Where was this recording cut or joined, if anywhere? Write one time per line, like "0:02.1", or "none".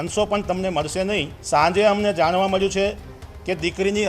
0:01.3